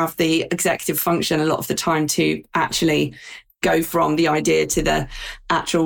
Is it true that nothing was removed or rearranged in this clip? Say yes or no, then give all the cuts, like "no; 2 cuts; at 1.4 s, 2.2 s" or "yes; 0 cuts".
yes; 0 cuts